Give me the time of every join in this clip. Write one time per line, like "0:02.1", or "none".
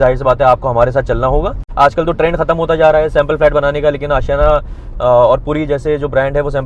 0:01.6